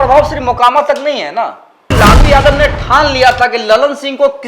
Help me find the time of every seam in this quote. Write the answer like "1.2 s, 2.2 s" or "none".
1.9 s